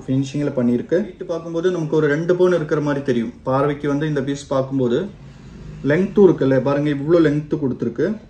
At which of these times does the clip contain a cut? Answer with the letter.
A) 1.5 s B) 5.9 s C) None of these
A